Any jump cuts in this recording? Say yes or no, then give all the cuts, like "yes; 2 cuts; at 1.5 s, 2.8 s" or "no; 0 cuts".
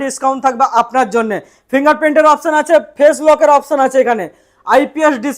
no; 0 cuts